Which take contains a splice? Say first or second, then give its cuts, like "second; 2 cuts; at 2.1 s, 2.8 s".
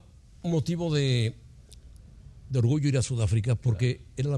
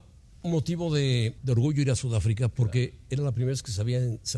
second; 1 cut; at 1.4 s